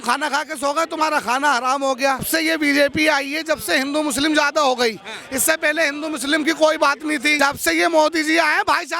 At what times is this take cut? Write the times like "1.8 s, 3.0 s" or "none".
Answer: 2.3 s, 7.3 s